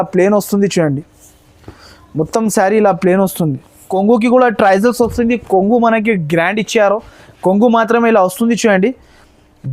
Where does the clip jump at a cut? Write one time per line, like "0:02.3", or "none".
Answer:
0:03.9